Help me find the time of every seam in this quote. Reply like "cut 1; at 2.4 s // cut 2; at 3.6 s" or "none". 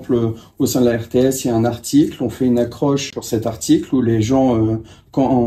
cut 1; at 3.1 s